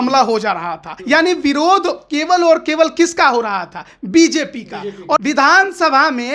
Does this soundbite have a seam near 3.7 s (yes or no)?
no